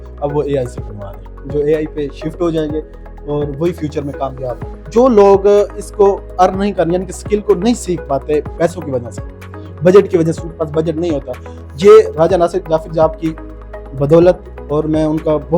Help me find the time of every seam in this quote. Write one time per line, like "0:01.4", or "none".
0:01.4
0:04.7